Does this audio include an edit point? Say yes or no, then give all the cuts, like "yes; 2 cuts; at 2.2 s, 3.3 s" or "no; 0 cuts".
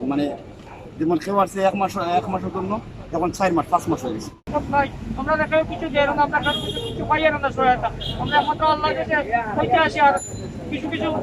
yes; 1 cut; at 4.5 s